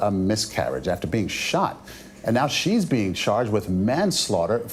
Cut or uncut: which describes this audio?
uncut